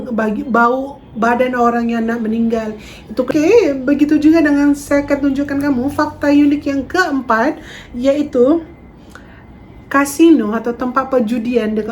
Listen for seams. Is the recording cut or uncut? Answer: cut